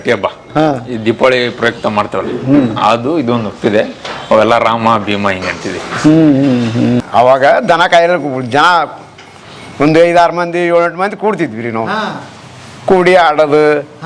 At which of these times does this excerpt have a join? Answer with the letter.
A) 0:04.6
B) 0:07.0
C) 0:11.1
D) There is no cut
B